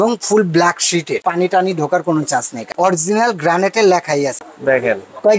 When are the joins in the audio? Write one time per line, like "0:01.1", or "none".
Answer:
0:01.2
0:02.6
0:04.4